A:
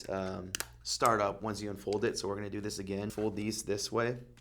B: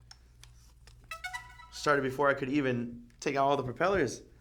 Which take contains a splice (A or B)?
A